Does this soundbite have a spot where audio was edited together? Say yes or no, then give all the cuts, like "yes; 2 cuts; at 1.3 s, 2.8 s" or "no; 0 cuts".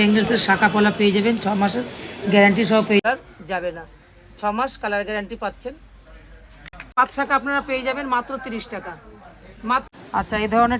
yes; 1 cut; at 3.0 s